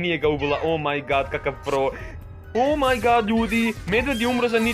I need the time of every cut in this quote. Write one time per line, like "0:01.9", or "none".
0:02.1